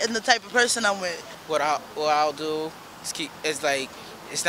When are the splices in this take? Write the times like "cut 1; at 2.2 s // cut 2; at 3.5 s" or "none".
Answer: cut 1; at 1.3 s